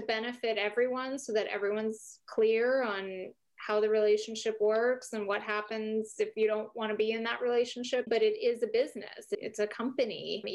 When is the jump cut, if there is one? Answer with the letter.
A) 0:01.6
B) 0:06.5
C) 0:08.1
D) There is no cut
C